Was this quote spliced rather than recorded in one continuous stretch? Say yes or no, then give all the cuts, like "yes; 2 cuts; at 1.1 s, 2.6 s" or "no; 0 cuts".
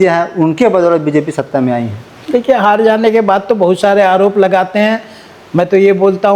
no; 0 cuts